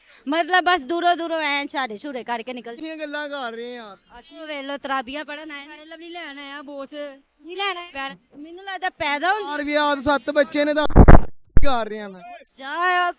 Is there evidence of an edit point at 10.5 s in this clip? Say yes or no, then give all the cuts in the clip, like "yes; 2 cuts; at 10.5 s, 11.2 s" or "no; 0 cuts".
no; 2 cuts; at 2.7 s, 8.1 s